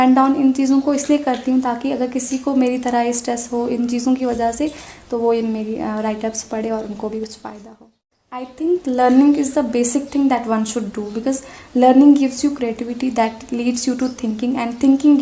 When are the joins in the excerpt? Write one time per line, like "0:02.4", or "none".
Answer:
0:08.5